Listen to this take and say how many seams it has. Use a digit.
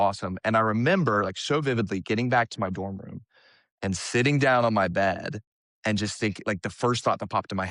0